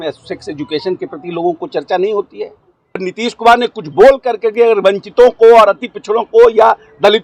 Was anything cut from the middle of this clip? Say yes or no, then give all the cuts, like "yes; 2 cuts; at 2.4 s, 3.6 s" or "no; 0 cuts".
yes; 1 cut; at 3.0 s